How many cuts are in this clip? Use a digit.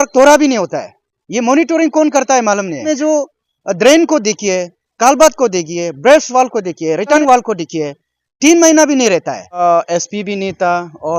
3